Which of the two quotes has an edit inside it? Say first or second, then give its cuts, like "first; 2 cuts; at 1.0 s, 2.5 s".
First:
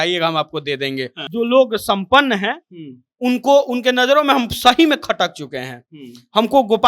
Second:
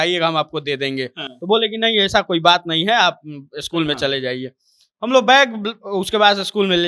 first; 1 cut; at 1.2 s